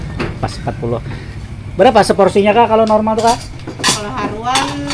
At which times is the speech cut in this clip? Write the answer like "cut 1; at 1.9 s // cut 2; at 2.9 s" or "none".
none